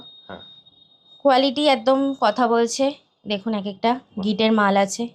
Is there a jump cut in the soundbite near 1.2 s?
no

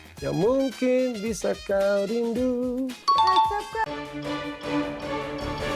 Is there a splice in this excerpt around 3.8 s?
yes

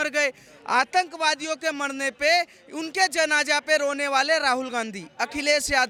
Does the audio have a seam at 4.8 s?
no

